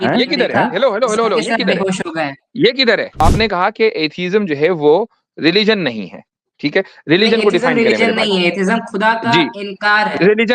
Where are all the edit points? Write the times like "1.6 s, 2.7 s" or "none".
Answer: 3.2 s